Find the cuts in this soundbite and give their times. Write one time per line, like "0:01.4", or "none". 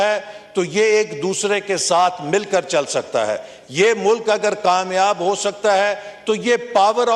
none